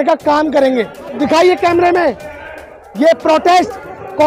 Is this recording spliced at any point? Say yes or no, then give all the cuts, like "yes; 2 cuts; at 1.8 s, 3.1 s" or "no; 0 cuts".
yes; 1 cut; at 1.2 s